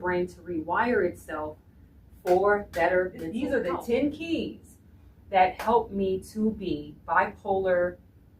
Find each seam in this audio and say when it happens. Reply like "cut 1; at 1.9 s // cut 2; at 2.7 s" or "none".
cut 1; at 3.7 s